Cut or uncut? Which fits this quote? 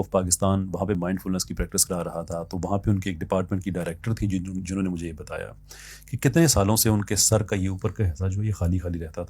cut